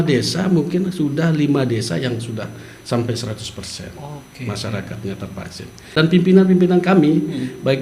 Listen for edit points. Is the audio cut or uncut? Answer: cut